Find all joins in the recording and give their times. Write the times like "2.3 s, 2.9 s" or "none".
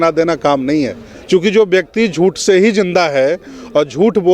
1.1 s